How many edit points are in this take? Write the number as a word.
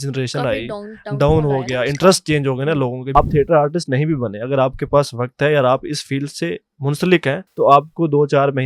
two